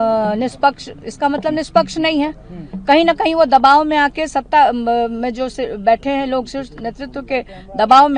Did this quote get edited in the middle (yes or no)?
no